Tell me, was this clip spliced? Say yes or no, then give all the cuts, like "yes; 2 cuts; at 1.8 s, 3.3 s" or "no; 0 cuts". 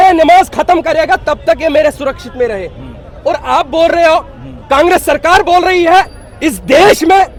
no; 0 cuts